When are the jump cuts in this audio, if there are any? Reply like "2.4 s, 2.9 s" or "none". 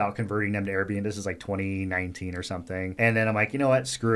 none